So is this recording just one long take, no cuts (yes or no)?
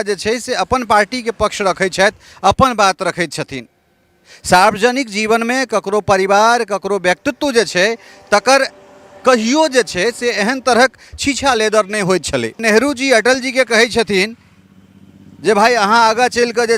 no